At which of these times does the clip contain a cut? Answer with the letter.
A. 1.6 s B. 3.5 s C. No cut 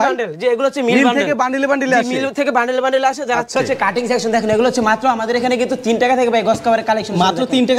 B